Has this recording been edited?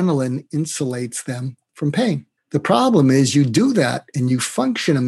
no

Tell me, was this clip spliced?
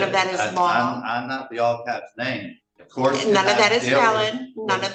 no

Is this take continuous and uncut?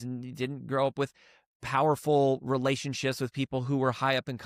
yes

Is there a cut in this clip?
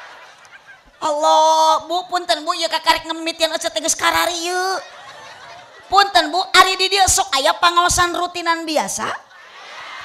no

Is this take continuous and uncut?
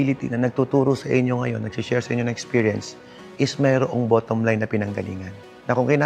yes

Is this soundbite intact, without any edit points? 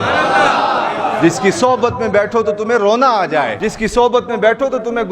no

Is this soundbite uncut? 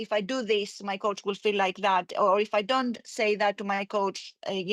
yes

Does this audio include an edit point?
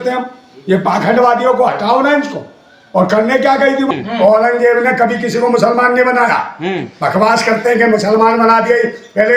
yes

